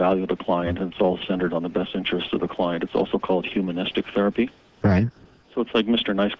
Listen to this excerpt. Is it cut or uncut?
cut